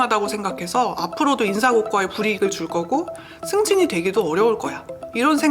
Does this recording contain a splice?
no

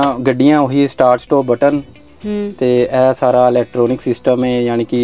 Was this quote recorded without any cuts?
yes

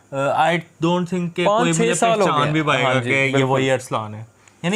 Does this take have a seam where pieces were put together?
no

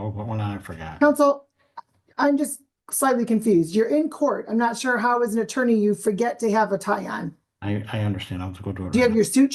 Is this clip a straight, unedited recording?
yes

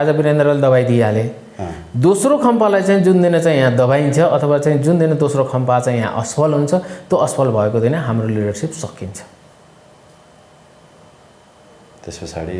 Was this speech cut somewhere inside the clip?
no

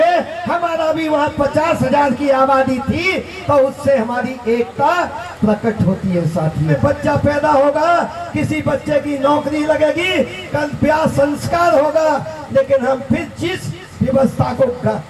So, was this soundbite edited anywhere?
yes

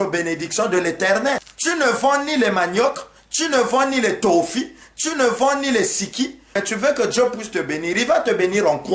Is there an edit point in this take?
yes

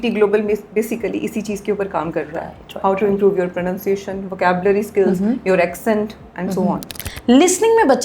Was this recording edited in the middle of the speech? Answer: yes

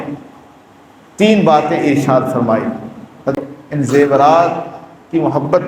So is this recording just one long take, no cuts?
no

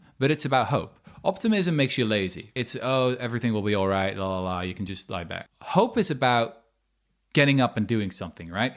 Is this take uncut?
no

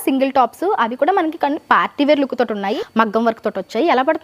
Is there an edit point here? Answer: yes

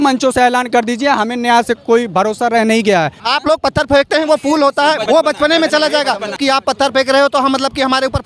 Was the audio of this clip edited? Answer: yes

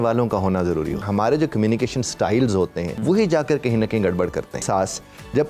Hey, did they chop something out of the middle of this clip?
yes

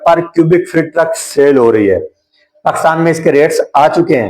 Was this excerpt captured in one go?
yes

